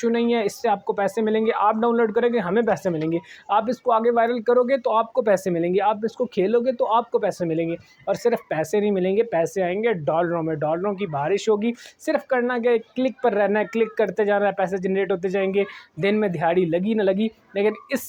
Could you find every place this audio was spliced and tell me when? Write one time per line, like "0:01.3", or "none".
none